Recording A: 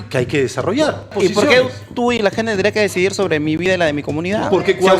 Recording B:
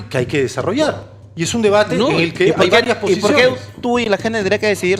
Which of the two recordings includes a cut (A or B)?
A